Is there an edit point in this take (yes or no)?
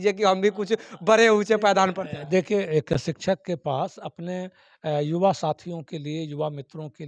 no